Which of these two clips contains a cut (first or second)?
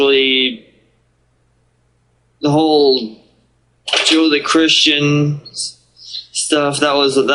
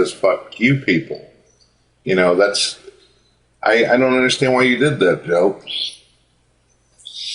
second